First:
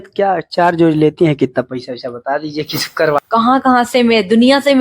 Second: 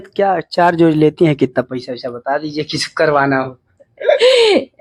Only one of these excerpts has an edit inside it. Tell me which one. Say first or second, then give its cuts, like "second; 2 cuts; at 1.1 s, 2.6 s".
first; 1 cut; at 3.2 s